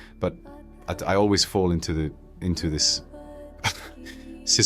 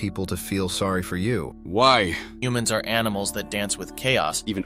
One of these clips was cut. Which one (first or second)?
second